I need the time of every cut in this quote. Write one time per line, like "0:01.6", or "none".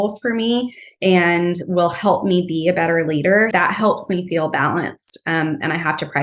0:03.5